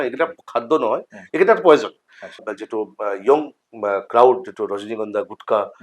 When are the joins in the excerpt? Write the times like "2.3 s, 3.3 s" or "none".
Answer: 2.4 s